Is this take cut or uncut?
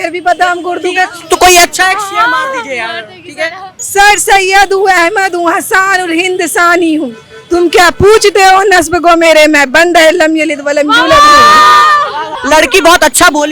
cut